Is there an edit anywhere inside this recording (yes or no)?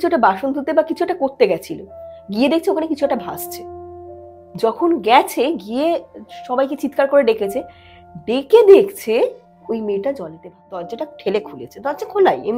yes